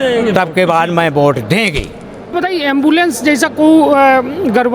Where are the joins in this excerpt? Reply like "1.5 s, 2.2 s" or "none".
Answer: 2.3 s